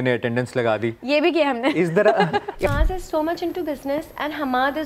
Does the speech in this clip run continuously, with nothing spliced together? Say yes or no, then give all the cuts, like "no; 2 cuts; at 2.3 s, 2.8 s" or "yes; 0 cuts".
no; 1 cut; at 2.7 s